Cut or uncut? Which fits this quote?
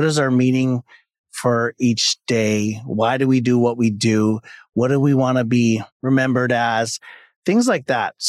cut